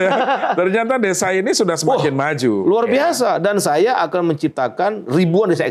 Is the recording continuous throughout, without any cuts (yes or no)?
yes